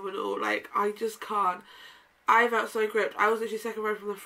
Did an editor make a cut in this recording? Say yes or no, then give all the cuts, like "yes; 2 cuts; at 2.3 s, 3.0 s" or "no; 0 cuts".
no; 0 cuts